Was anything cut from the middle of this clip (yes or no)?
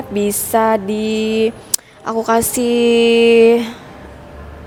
no